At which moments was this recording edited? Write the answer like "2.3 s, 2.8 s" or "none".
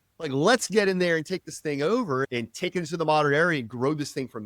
2.2 s